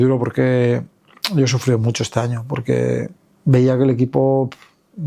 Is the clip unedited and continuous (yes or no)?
yes